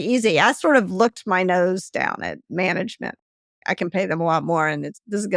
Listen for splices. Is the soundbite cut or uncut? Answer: cut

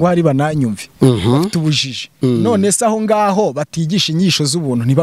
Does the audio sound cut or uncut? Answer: uncut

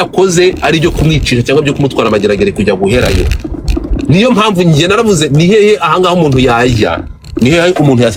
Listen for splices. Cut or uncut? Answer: uncut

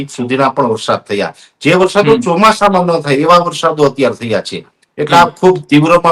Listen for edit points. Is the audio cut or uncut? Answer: uncut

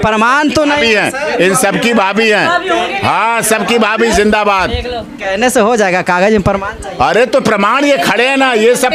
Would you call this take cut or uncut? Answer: uncut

